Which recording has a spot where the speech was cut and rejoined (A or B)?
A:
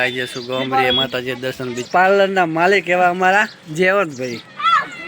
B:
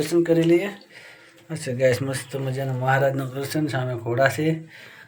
A